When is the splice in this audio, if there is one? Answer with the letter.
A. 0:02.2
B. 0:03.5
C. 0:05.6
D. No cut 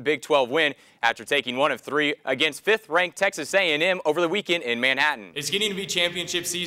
C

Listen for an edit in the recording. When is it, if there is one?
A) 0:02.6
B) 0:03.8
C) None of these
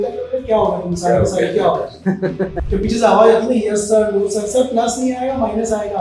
A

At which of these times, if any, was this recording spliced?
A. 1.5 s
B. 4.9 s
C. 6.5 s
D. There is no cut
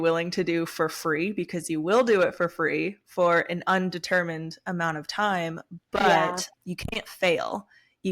C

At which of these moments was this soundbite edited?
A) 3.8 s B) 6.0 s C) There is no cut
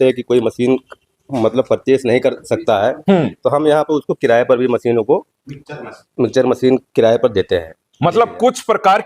C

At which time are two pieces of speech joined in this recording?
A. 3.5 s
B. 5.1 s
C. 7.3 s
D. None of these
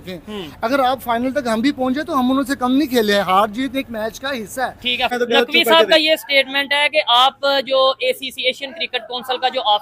B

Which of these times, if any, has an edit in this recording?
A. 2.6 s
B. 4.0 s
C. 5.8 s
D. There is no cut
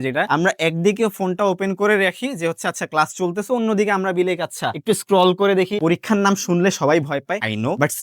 C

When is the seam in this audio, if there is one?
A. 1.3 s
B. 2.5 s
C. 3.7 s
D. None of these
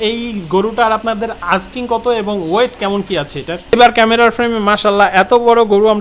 C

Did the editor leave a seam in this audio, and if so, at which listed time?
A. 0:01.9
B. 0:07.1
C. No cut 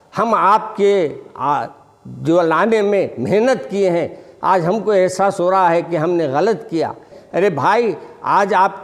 B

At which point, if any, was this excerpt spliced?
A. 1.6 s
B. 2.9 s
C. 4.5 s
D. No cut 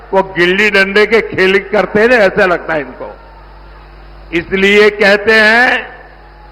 D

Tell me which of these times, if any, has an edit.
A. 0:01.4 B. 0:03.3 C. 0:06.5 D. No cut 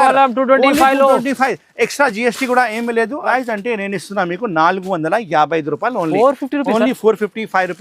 B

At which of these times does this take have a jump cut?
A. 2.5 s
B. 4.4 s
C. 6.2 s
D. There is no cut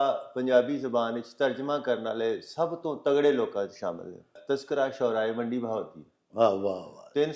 B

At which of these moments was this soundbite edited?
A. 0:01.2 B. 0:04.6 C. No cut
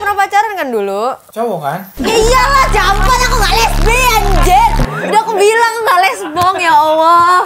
A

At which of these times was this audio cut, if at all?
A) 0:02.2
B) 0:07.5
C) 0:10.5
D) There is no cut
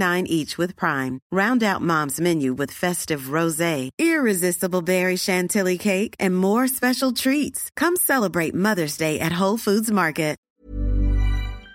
C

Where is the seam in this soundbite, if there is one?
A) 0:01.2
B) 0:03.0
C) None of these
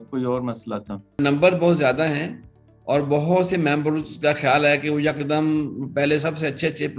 A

